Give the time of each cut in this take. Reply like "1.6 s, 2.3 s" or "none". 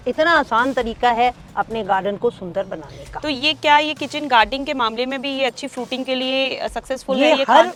none